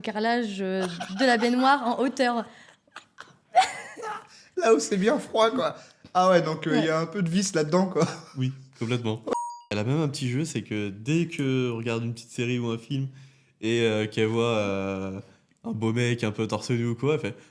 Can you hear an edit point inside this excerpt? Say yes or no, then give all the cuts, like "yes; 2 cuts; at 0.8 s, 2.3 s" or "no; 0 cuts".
yes; 1 cut; at 9.3 s